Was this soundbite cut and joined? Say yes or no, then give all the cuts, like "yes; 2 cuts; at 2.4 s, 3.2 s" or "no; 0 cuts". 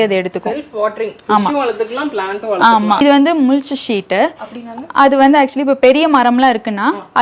yes; 1 cut; at 3.0 s